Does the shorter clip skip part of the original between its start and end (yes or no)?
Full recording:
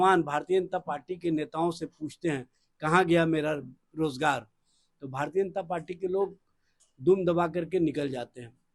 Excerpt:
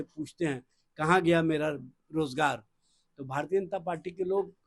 no